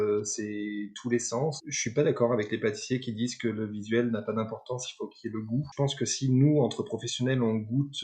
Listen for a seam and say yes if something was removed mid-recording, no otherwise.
yes